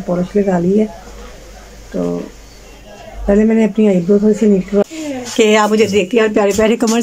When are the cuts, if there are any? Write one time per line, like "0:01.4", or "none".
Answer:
0:04.8